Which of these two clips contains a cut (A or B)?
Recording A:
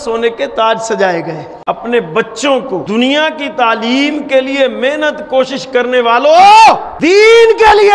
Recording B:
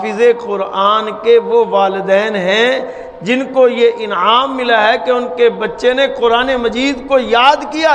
A